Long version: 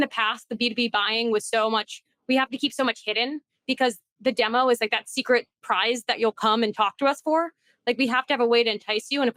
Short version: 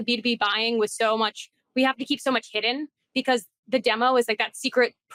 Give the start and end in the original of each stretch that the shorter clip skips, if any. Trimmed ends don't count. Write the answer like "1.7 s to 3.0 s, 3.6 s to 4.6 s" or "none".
none